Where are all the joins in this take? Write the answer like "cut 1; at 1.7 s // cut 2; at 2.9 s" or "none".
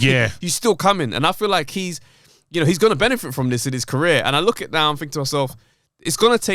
none